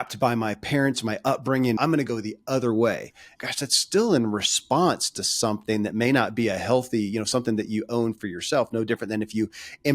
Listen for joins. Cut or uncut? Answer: cut